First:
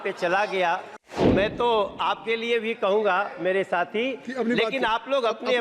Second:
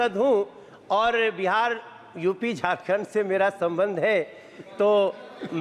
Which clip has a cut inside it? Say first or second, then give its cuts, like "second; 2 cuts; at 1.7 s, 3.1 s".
first; 1 cut; at 1.2 s